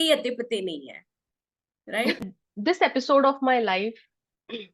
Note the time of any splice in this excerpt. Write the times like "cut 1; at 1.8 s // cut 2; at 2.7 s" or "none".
cut 1; at 2.2 s